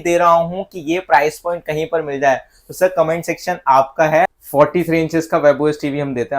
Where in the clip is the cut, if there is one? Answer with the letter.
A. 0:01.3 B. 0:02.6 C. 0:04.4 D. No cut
C